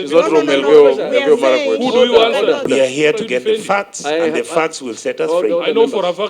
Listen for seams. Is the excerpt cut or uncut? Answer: cut